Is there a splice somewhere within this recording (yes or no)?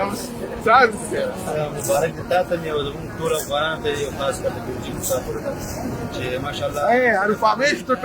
yes